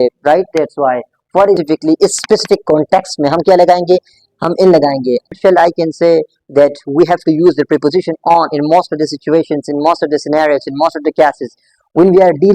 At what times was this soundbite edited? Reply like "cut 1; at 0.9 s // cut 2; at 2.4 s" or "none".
cut 1; at 1.6 s // cut 2; at 5.4 s